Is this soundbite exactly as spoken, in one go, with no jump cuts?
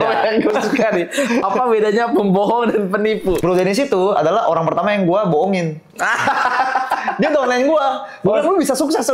no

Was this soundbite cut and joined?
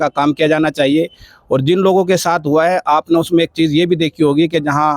no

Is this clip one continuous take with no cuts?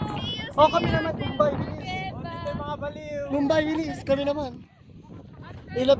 yes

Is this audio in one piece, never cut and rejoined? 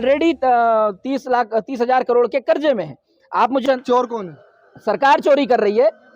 no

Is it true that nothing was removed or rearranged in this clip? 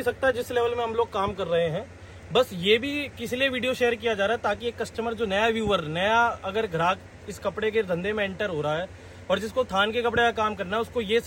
yes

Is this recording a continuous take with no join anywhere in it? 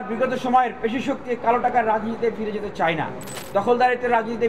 yes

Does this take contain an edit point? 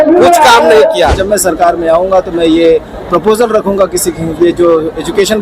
yes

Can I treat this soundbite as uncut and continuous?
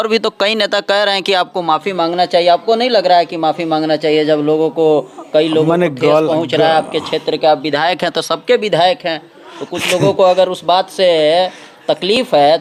yes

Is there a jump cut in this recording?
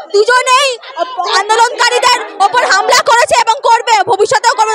no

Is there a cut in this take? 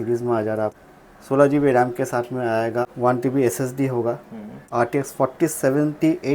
yes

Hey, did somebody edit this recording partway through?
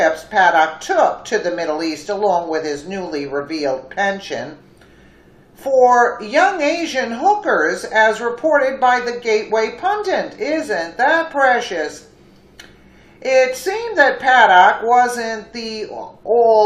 no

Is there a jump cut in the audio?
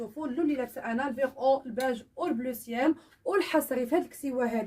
yes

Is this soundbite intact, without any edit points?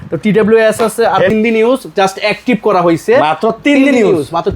no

